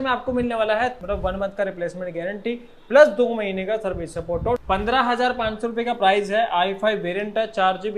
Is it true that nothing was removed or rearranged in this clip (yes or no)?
no